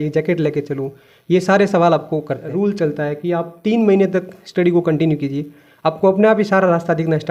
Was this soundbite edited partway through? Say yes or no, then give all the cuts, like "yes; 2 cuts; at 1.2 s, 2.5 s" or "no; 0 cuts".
yes; 1 cut; at 2.5 s